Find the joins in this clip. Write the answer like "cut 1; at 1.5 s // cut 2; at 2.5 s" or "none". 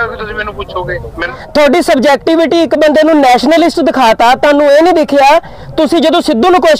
cut 1; at 1.4 s